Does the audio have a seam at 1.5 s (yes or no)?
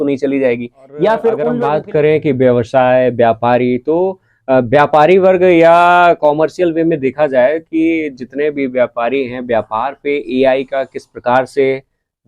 yes